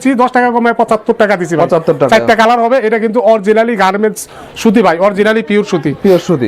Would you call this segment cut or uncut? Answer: uncut